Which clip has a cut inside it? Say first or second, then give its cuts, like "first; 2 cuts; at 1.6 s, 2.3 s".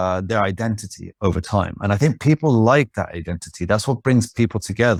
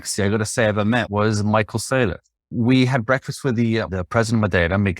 second; 3 cuts; at 1.1 s, 2.5 s, 3.9 s